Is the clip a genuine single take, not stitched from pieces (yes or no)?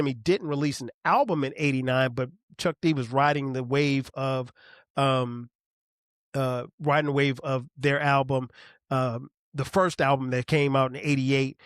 yes